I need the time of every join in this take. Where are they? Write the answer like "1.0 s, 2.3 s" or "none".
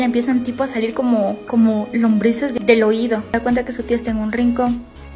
2.6 s, 3.3 s